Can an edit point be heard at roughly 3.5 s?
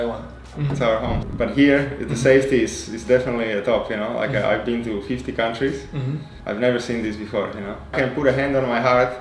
no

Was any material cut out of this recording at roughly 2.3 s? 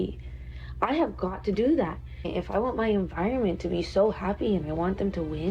yes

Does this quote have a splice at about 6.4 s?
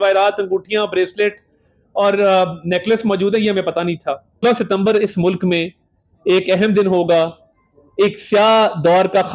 no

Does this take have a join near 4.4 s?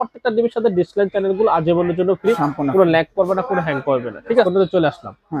yes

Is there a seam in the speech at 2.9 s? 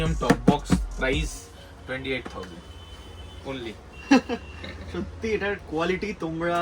no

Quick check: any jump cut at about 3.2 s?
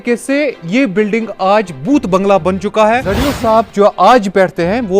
yes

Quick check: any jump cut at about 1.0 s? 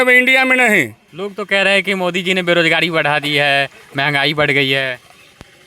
yes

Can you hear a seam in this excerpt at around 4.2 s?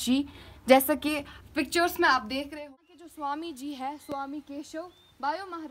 no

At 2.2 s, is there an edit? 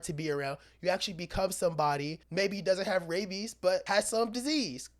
yes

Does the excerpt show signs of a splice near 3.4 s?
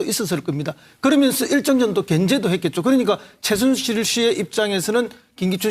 no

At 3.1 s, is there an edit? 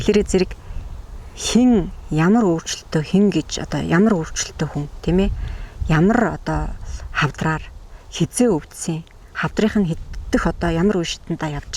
no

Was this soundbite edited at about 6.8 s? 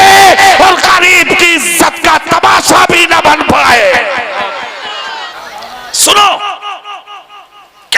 no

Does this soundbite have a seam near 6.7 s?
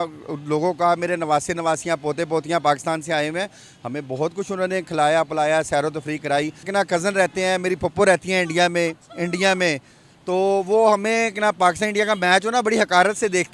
yes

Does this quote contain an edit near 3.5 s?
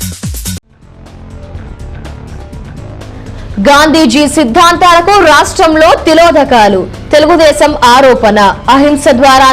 yes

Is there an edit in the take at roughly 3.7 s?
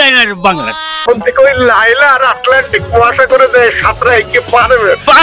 no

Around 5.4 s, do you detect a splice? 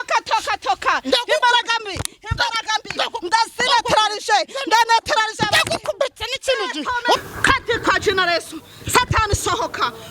no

